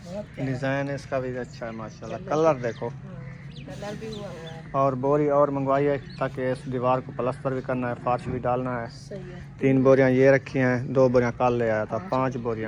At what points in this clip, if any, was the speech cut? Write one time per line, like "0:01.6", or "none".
none

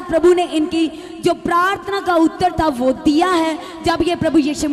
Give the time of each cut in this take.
none

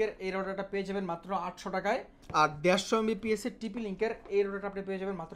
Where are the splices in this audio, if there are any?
0:02.2

